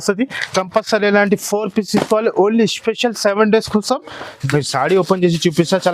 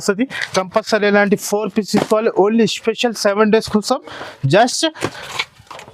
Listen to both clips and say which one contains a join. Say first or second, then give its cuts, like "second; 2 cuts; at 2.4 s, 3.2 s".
first; 1 cut; at 4.3 s